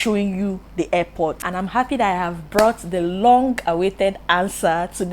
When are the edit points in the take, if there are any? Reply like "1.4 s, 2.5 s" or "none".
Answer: 1.4 s